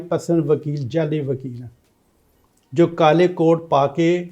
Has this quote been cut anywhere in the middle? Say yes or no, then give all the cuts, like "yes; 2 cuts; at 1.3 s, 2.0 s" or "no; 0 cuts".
no; 0 cuts